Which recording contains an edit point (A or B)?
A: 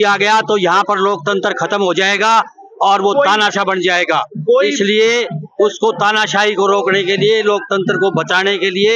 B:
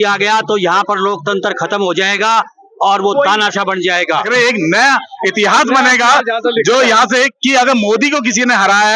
B